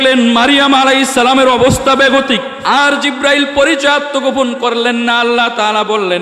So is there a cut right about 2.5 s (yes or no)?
yes